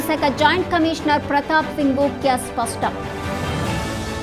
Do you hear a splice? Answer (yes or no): yes